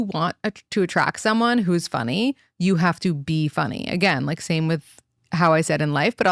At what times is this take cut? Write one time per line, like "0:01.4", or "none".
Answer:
none